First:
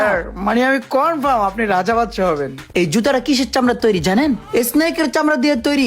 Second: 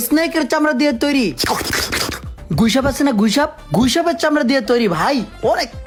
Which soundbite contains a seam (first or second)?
first